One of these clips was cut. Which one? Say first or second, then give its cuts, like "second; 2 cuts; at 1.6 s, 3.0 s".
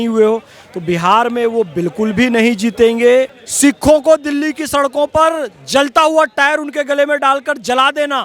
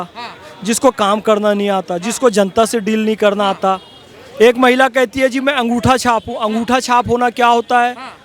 first; 1 cut; at 3.4 s